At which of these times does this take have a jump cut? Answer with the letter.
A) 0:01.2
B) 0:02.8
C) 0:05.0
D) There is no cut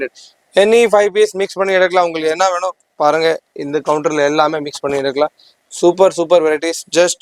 D